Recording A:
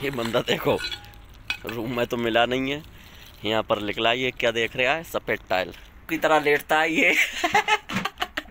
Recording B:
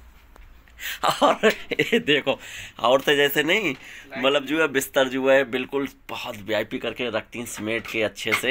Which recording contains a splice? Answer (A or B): A